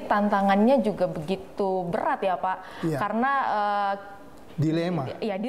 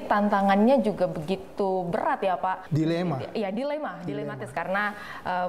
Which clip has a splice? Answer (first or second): second